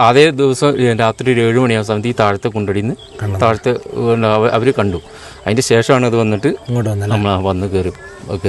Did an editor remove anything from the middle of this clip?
no; 0 cuts

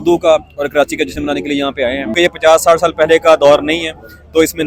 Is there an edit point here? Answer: yes; 1 cut; at 2.1 s

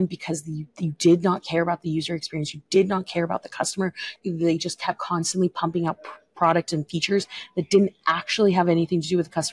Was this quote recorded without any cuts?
no; 1 cut; at 4.1 s

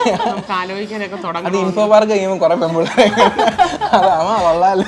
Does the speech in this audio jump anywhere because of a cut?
no; 0 cuts

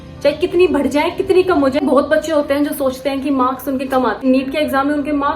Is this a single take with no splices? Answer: no; 2 cuts; at 1.8 s, 4.2 s

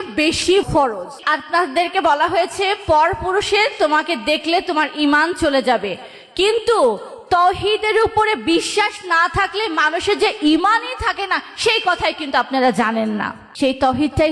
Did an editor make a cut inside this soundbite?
yes; 1 cut; at 1.1 s

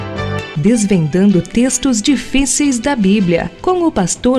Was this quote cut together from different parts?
no; 0 cuts

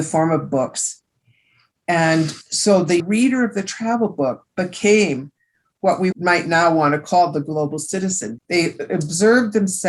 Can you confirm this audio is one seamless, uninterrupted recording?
no; 1 cut; at 3.0 s

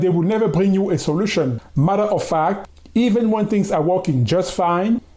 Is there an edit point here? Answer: no; 0 cuts

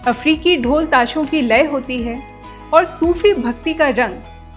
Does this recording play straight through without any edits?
yes; 0 cuts

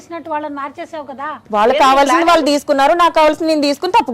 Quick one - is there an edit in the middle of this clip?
yes; 1 cut; at 1.4 s

